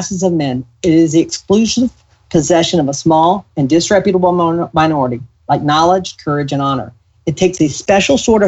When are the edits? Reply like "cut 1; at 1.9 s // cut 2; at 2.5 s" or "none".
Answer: none